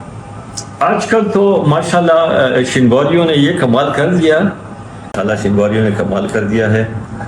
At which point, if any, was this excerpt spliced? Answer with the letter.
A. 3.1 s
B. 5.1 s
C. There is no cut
B